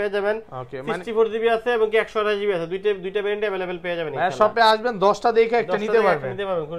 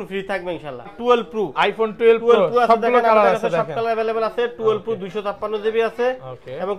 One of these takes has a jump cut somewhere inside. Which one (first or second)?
second